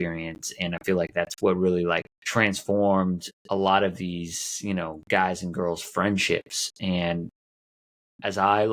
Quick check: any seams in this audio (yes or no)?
yes